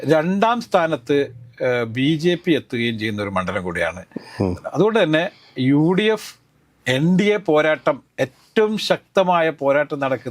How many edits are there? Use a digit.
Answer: 0